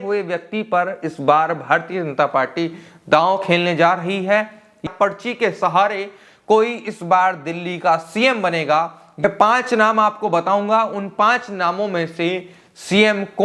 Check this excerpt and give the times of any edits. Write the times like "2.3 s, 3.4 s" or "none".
4.9 s, 9.2 s